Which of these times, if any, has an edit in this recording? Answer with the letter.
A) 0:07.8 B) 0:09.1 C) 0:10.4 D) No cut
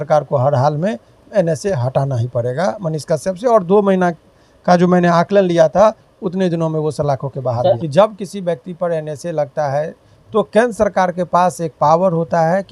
A